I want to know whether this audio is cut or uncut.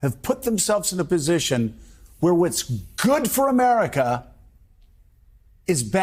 uncut